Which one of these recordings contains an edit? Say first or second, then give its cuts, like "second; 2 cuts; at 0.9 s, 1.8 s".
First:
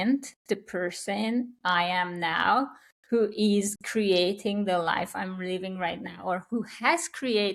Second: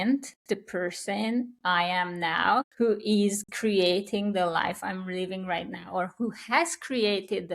second; 1 cut; at 2.7 s